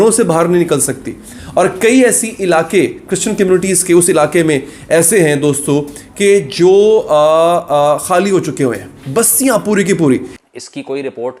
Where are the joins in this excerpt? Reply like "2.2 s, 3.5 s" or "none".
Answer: 10.4 s